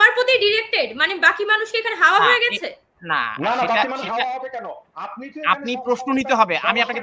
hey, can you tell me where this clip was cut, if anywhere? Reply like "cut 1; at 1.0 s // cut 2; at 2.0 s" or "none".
none